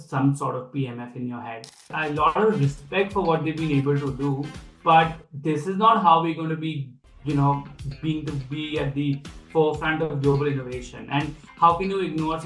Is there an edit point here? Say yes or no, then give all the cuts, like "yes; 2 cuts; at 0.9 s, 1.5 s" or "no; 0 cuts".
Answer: yes; 2 cuts; at 1.8 s, 4.6 s